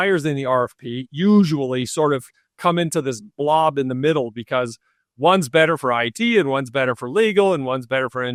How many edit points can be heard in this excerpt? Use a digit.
0